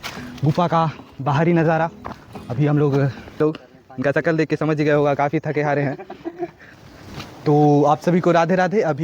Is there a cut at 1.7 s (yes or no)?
no